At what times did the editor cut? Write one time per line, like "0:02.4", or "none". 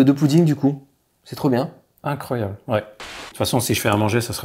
0:03.1